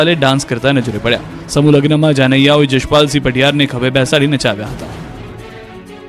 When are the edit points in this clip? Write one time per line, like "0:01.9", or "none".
0:01.3

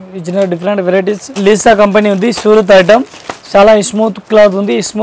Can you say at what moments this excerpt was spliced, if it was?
0:01.3

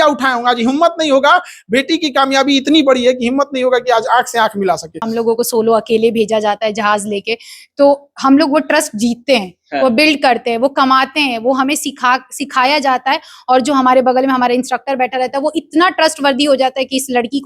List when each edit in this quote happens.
0:05.1

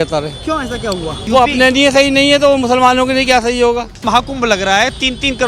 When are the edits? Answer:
0:01.1
0:04.0

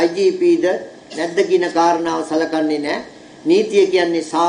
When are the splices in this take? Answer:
none

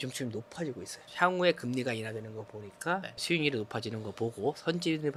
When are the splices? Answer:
none

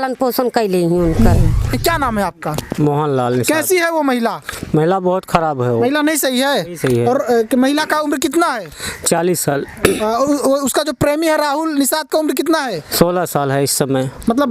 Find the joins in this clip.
0:01.7

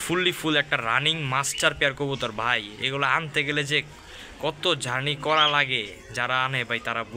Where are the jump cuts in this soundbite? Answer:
none

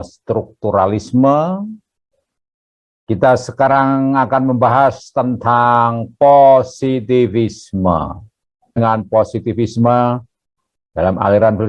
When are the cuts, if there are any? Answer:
0:08.8

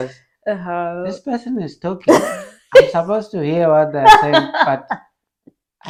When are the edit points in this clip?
none

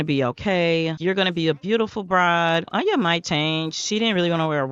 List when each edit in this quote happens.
none

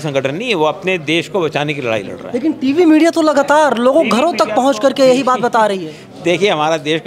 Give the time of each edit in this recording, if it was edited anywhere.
none

